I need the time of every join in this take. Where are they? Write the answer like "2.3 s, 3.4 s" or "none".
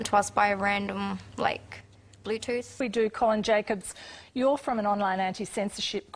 1.3 s